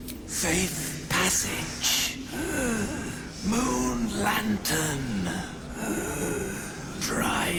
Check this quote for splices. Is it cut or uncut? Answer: uncut